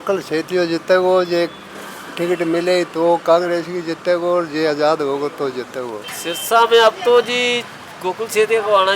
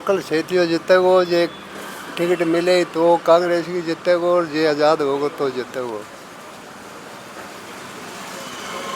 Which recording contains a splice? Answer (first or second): first